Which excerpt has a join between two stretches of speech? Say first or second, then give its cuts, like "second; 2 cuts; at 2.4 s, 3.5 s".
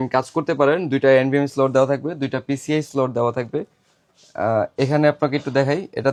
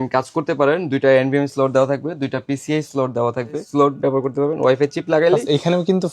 second; 1 cut; at 3.6 s